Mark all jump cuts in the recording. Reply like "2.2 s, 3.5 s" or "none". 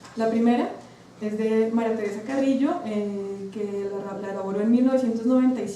4.6 s